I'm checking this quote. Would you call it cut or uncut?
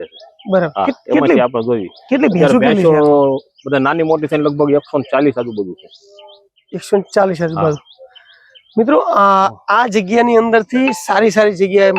uncut